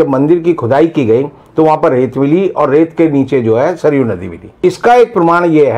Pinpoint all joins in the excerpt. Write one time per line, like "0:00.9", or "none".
0:04.6